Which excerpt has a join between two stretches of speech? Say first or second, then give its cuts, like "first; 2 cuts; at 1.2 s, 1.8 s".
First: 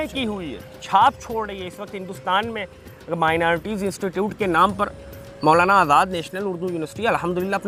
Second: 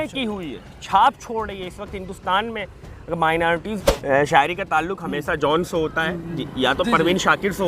second; 1 cut; at 3.8 s